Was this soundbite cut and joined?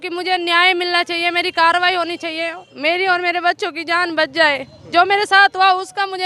no; 0 cuts

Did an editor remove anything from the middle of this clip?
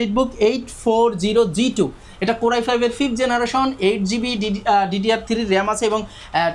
no; 0 cuts

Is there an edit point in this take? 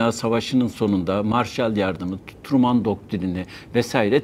no; 0 cuts

